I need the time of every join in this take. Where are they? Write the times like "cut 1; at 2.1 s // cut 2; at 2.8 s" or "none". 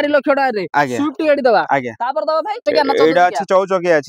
cut 1; at 2.6 s